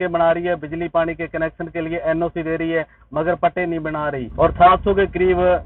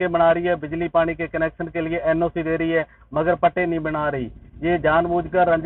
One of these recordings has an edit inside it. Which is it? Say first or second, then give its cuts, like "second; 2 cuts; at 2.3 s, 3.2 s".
first; 1 cut; at 4.2 s